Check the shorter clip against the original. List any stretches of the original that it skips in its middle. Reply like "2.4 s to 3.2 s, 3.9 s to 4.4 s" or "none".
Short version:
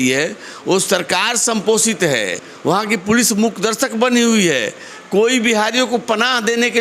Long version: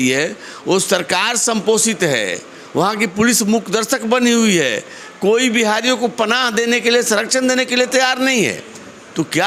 2.5 s to 2.6 s